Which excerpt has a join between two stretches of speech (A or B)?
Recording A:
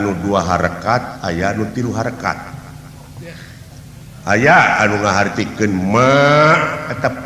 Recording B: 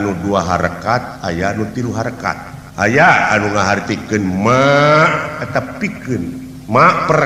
B